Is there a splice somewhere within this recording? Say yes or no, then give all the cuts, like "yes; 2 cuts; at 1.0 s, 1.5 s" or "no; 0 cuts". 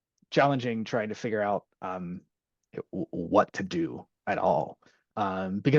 no; 0 cuts